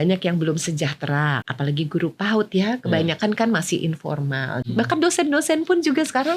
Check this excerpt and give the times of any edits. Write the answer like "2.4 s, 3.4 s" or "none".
1.5 s, 4.6 s